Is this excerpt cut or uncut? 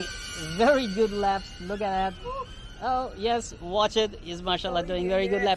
uncut